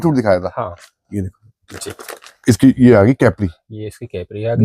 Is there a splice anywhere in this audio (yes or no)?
no